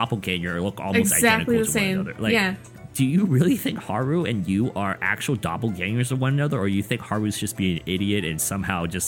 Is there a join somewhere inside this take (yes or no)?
yes